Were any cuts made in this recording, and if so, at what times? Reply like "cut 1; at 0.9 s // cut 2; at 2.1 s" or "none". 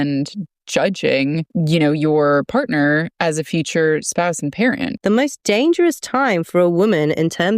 cut 1; at 1.5 s // cut 2; at 4.9 s